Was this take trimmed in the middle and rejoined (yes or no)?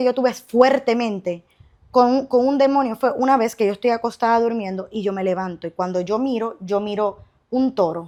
no